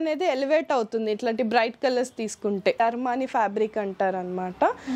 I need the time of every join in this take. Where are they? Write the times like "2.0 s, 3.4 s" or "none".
2.8 s